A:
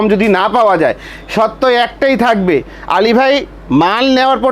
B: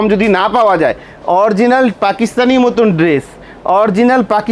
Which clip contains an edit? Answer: B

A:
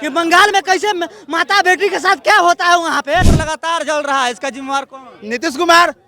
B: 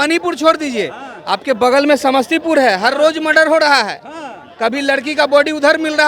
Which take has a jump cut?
A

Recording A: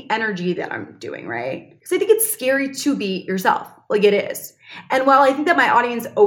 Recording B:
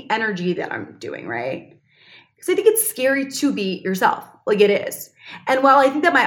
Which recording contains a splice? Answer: A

